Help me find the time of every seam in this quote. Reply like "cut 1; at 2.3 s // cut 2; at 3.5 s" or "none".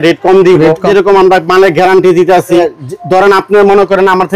cut 1; at 0.8 s // cut 2; at 2.6 s